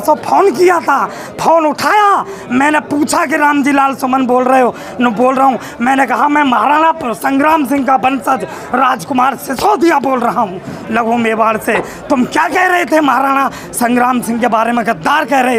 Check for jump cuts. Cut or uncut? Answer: uncut